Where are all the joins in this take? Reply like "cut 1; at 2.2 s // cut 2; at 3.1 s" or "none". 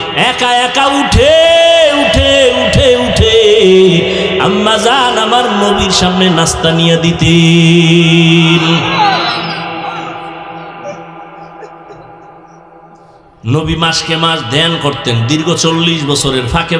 cut 1; at 13.3 s